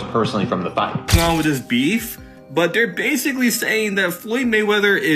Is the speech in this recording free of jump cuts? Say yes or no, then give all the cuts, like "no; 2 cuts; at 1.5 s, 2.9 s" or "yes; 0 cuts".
no; 1 cut; at 1.2 s